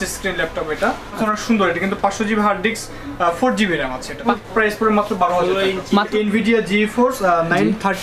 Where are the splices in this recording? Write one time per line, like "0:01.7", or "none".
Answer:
0:01.2
0:04.3
0:06.1